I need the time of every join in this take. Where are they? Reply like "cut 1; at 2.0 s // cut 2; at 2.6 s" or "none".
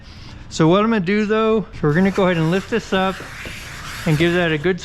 cut 1; at 1.7 s